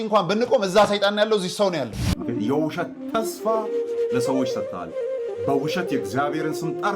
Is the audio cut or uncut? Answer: cut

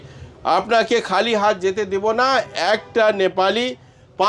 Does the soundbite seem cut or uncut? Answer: uncut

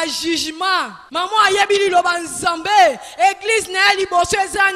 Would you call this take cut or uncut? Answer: cut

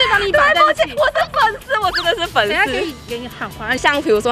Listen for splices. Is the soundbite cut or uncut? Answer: uncut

